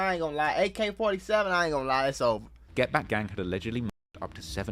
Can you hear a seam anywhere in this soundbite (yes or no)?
yes